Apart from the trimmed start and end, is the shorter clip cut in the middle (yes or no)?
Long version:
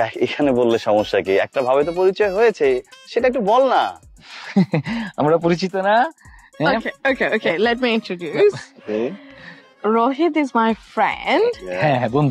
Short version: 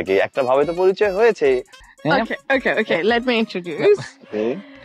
yes